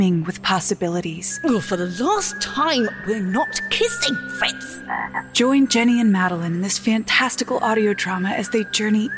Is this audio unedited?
no; 2 cuts; at 1.4 s, 5.2 s

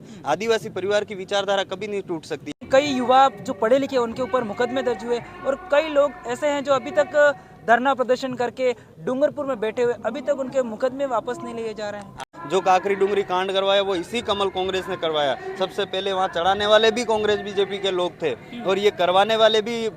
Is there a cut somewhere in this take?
yes; 2 cuts; at 2.6 s, 12.2 s

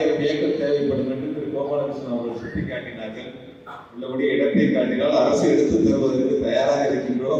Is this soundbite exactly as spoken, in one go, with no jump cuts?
yes; 0 cuts

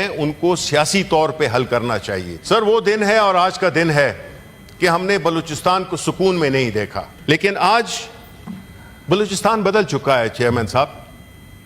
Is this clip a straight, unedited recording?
no; 2 cuts; at 2.3 s, 7.1 s

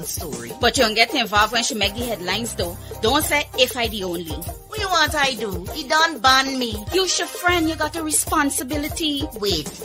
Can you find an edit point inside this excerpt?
no; 0 cuts

